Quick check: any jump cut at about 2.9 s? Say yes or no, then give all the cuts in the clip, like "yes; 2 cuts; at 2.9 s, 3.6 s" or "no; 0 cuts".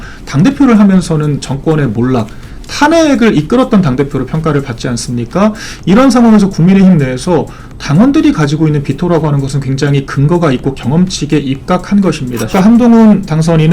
no; 1 cut; at 12.5 s